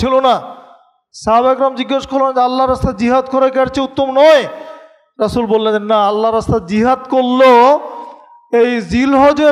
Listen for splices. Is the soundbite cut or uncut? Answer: uncut